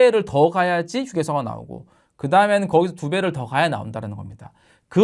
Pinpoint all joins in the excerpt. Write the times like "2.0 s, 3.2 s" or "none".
none